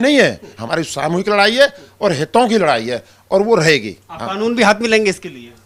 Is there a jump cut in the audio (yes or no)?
no